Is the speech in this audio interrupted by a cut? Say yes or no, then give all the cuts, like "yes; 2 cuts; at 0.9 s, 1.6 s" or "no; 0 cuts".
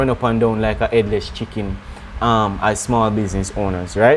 no; 0 cuts